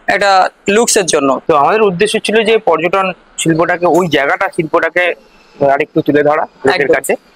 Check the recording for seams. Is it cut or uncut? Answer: cut